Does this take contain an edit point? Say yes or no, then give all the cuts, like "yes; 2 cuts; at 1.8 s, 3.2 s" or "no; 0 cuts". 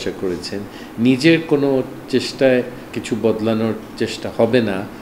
yes; 1 cut; at 2.9 s